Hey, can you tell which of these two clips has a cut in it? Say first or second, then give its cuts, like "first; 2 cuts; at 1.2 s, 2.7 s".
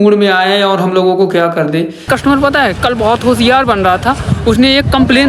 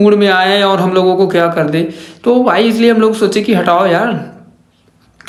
first; 1 cut; at 2.1 s